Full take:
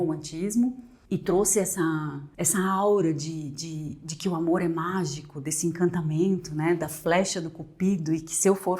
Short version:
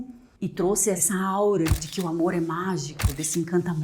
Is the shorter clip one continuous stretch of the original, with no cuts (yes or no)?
no